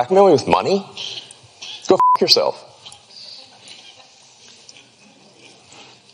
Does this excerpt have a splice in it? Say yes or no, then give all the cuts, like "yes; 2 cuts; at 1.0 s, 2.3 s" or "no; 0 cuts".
no; 0 cuts